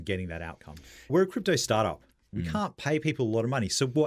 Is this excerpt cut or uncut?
cut